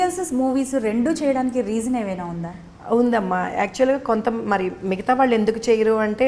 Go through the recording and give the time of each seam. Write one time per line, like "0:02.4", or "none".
none